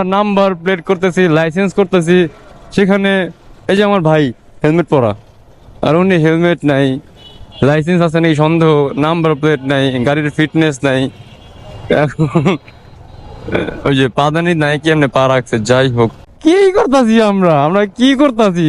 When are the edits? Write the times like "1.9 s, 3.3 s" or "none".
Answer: 15.8 s